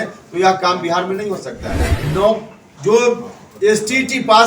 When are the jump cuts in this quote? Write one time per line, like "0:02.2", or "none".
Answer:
0:01.9